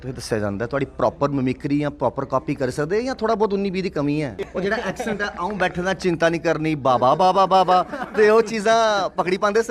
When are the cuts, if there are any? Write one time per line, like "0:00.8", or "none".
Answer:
0:04.5